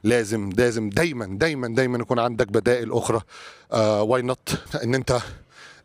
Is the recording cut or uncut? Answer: uncut